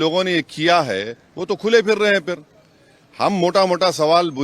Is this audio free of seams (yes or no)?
yes